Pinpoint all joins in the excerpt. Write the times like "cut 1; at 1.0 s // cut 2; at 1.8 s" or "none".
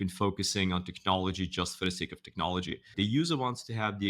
cut 1; at 2.8 s